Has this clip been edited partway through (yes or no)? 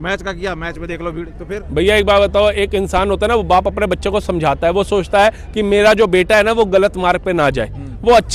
no